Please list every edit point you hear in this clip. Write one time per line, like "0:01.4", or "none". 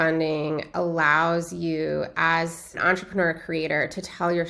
0:02.8